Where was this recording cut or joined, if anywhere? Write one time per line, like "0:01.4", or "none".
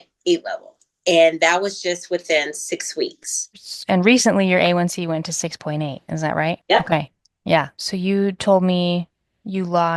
0:06.6
0:07.3